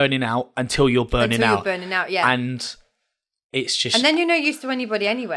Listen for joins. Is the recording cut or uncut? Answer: uncut